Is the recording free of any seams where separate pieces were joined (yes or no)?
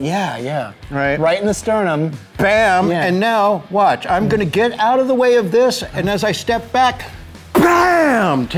yes